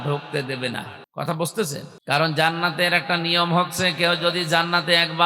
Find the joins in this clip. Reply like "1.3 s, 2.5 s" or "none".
1.0 s, 1.9 s